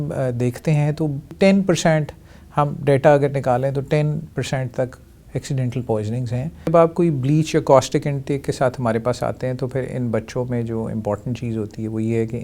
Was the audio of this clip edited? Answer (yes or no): yes